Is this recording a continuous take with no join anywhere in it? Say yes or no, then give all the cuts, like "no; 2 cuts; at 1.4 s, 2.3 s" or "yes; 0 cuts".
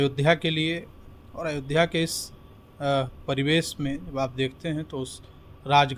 yes; 0 cuts